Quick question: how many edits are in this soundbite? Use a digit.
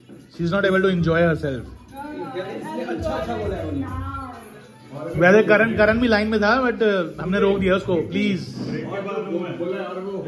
0